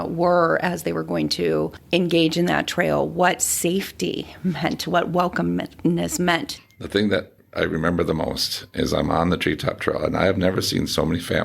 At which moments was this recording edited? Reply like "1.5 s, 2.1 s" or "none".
6.5 s